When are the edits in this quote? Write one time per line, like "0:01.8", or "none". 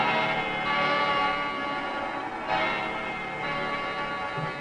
0:03.2